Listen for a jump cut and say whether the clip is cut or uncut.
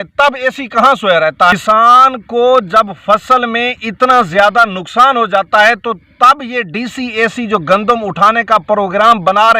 cut